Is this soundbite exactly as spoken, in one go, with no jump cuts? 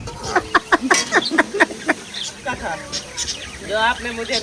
no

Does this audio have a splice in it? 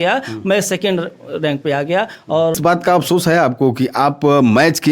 yes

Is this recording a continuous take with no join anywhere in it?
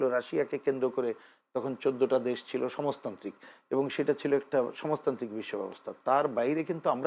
yes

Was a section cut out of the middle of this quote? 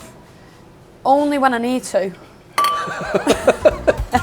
no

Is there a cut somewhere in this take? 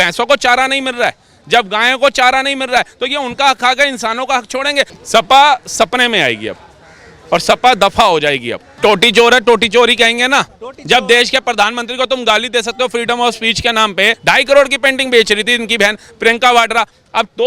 yes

